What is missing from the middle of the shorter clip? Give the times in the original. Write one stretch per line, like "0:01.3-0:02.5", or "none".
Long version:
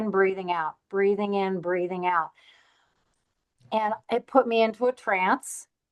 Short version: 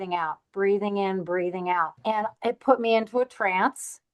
0:02.3-0:03.6